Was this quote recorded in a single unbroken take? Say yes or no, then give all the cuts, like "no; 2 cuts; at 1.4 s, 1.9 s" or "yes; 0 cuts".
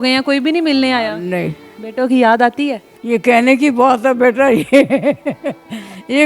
no; 2 cuts; at 1.8 s, 2.9 s